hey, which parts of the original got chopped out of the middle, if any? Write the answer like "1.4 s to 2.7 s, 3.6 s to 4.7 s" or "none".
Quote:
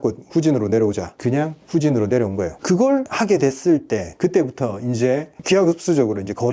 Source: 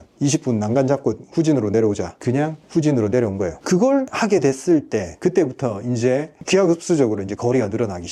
none